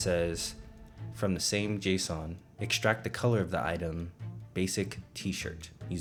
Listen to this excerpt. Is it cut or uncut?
uncut